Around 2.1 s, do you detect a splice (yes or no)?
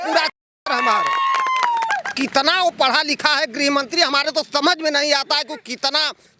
yes